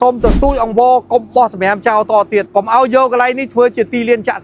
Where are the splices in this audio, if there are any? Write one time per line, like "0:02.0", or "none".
0:02.5